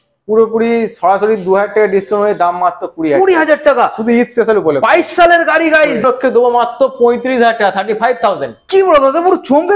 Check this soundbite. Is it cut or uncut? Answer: cut